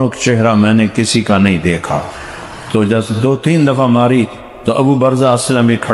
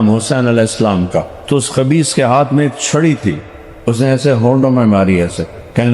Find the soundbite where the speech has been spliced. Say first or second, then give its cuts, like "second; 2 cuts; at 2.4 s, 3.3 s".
second; 1 cut; at 1.4 s